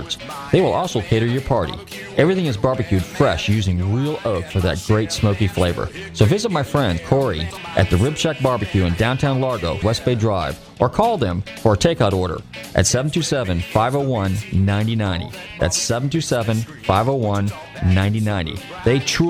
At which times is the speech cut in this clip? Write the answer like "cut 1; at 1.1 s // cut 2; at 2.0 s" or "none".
cut 1; at 7.2 s // cut 2; at 9.8 s